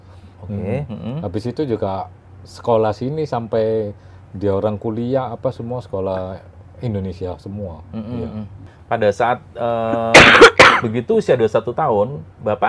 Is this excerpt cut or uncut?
cut